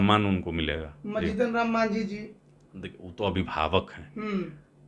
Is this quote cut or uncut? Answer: uncut